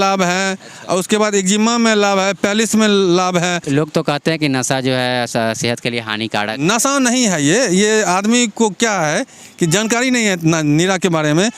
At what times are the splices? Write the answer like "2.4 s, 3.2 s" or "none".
3.6 s